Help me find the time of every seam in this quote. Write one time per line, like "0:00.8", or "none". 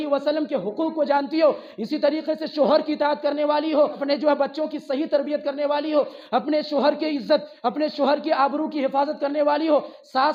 none